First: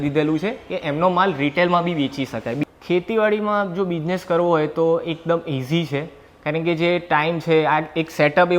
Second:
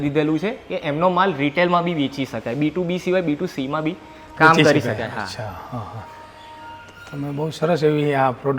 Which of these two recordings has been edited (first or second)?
first